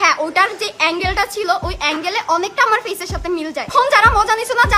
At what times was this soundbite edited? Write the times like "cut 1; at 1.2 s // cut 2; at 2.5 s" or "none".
cut 1; at 3.7 s

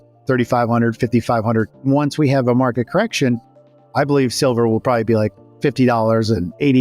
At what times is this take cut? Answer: cut 1; at 1.8 s

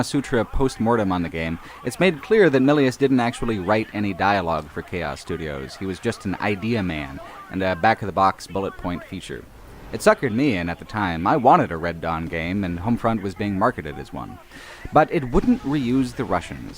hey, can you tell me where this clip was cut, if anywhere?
none

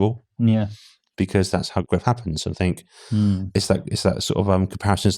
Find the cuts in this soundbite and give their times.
cut 1; at 1.9 s

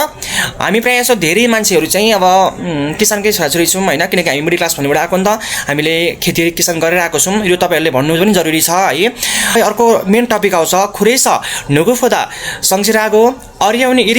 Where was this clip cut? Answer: cut 1; at 9.6 s

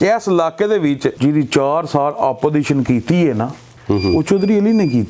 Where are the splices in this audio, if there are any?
cut 1; at 1.2 s // cut 2; at 3.7 s

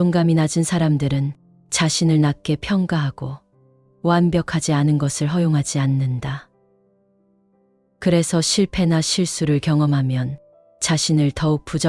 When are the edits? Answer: none

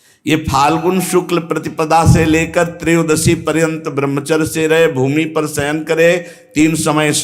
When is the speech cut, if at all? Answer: cut 1; at 1.0 s

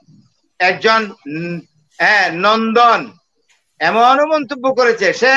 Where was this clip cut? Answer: none

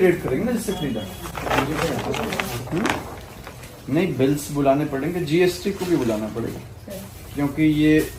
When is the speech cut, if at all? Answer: none

